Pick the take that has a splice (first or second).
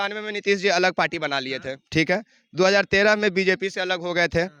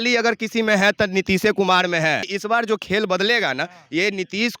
second